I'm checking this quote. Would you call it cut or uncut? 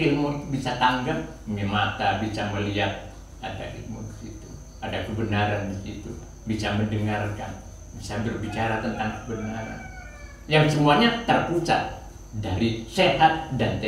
uncut